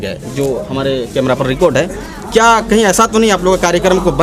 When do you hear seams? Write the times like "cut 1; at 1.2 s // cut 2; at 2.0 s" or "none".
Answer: none